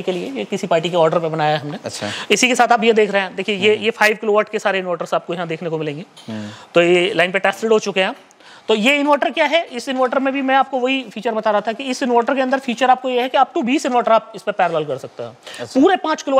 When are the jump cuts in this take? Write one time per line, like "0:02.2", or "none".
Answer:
none